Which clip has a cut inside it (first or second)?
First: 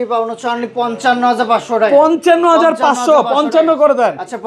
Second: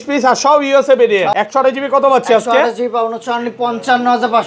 second